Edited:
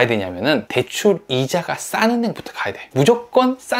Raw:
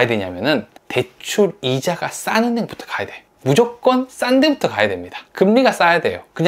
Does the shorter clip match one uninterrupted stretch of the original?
no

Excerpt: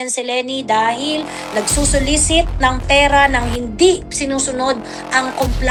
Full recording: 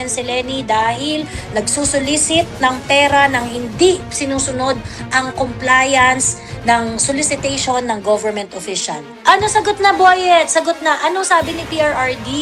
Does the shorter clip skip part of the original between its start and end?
no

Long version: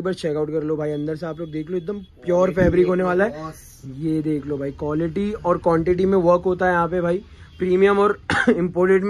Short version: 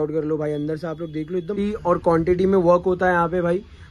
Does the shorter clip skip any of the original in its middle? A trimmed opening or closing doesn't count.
yes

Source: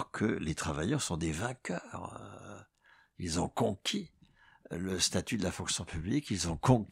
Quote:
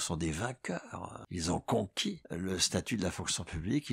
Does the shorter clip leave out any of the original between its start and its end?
yes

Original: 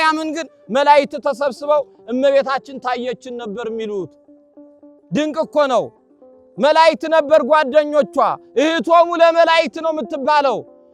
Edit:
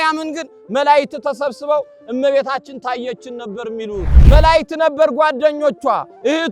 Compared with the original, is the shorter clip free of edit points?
no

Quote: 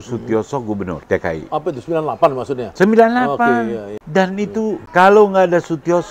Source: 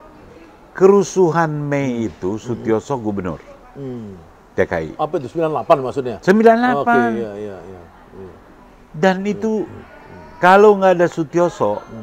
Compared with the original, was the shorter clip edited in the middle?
yes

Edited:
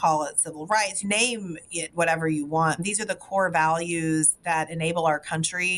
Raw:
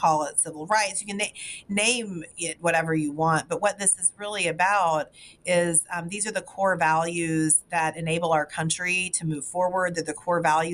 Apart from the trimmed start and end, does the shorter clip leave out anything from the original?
yes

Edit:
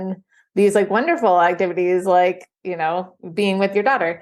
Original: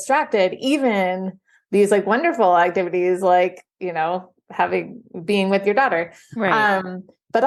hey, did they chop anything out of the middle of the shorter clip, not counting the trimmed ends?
yes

